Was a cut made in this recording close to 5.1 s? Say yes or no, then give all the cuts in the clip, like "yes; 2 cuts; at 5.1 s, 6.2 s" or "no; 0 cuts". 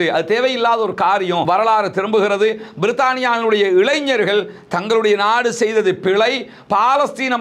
no; 1 cut; at 1.4 s